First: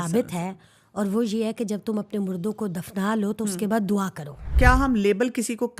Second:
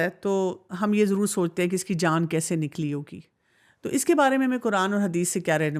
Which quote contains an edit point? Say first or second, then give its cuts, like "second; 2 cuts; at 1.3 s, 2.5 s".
first; 1 cut; at 4.5 s